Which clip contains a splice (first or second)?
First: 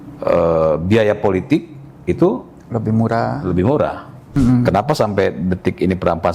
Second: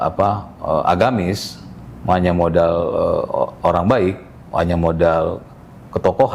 first